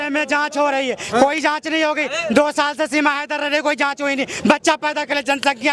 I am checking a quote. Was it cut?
no; 0 cuts

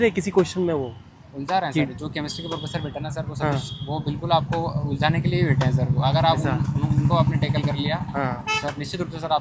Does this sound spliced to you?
no; 0 cuts

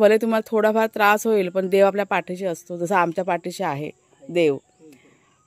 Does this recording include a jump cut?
no; 0 cuts

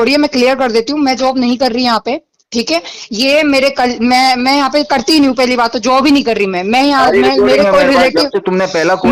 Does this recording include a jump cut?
no; 0 cuts

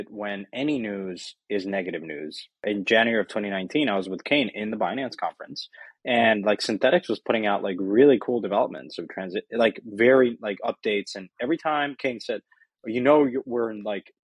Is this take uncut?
no; 1 cut; at 2.6 s

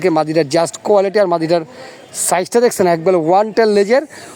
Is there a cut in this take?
no; 0 cuts

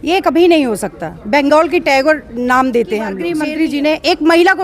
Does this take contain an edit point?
yes; 1 cut; at 3.3 s

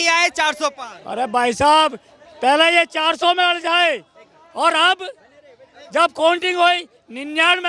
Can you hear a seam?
no; 0 cuts

